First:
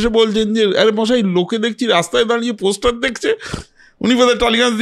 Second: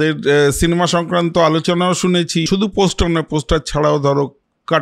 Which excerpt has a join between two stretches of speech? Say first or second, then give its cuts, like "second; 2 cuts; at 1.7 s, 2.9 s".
second; 1 cut; at 2.5 s